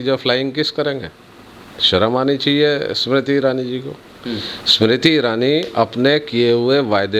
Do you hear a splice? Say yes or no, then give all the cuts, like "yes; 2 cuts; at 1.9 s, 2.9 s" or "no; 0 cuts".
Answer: no; 0 cuts